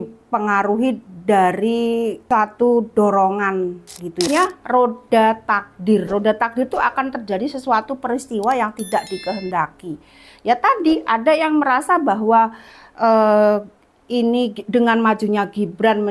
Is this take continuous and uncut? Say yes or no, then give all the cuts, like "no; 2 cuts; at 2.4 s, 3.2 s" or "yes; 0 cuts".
no; 2 cuts; at 2.2 s, 4.3 s